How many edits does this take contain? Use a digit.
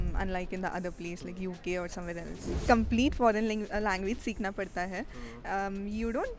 1